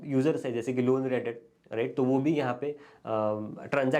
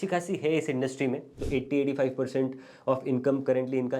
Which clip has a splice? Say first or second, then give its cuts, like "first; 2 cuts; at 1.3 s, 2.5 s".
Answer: second; 1 cut; at 1.3 s